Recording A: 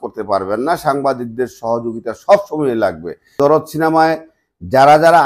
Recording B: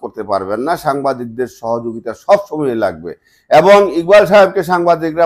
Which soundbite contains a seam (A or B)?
A